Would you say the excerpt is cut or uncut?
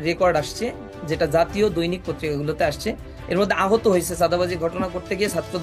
uncut